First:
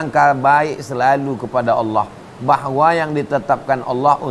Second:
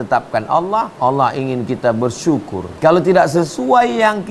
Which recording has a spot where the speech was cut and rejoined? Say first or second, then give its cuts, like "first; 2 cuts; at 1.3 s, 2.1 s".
second; 2 cuts; at 0.9 s, 2.6 s